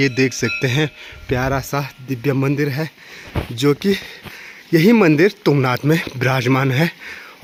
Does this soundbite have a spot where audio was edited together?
no; 0 cuts

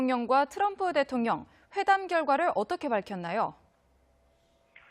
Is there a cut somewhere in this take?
yes; 1 cut; at 1.6 s

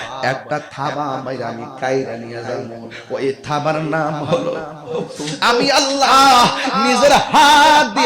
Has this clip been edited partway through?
yes; 1 cut; at 5.3 s

